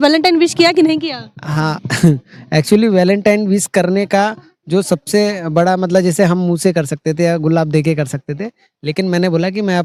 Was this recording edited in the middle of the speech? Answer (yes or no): no